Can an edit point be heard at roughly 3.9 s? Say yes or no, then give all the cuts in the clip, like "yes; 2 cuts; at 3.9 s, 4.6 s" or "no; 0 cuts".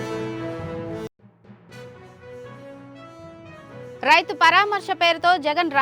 yes; 1 cut; at 3.9 s